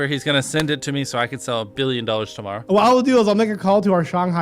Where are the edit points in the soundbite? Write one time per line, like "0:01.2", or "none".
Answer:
0:02.5